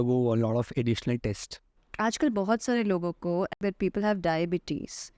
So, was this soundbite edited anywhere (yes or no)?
yes